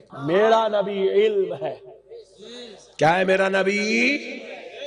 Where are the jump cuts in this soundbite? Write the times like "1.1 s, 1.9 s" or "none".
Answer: none

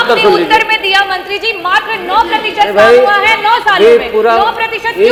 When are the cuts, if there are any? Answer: none

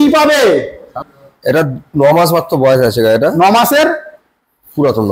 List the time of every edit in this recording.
1.0 s

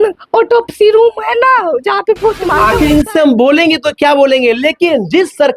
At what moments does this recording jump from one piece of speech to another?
2.6 s

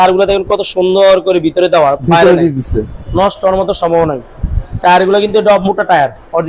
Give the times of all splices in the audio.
none

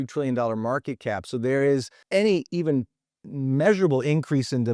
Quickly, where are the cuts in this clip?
2.0 s

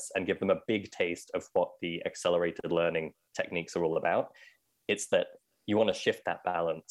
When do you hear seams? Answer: none

